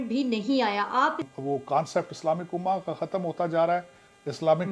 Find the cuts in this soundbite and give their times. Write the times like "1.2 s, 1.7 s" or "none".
1.3 s